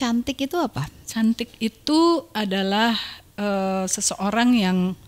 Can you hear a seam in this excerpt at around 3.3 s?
no; 0 cuts

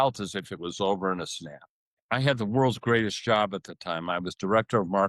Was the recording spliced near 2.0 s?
yes; 1 cut; at 2.0 s

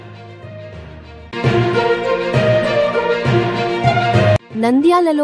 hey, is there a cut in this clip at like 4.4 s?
yes; 2 cuts; at 1.3 s, 4.4 s

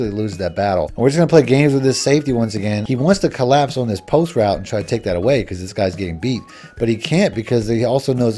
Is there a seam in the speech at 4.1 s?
no; 2 cuts; at 0.9 s, 2.8 s

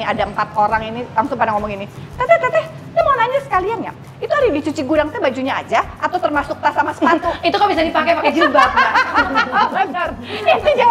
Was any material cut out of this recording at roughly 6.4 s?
no; 0 cuts

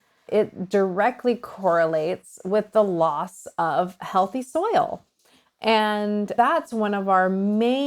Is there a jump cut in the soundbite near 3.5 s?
no; 1 cut; at 6.3 s

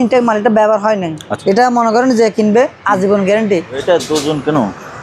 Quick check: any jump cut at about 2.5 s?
no; 2 cuts; at 1.3 s, 3.8 s

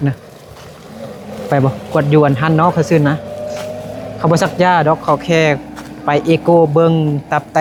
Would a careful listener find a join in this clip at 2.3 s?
no; 0 cuts

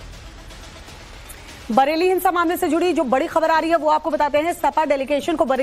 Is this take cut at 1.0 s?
yes; 1 cut; at 1.0 s

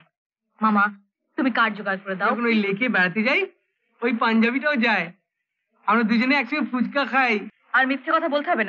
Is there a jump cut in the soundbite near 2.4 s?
yes; 2 cuts; at 2.4 s, 7.5 s

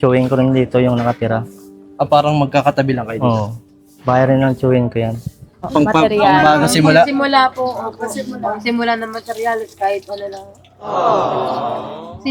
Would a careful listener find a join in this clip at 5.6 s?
yes; 1 cut; at 5.6 s

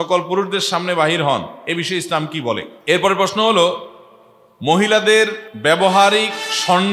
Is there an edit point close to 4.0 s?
no; 2 cuts; at 2.7 s, 5.4 s

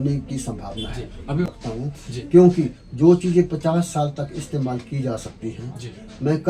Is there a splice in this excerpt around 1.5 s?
yes; 1 cut; at 1.5 s

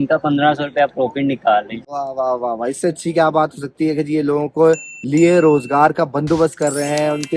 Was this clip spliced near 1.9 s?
no; 0 cuts

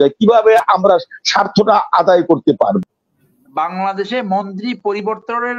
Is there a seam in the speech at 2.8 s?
yes; 1 cut; at 2.8 s

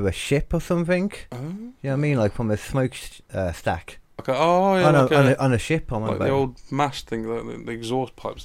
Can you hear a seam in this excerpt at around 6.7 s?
no; 1 cut; at 4.2 s

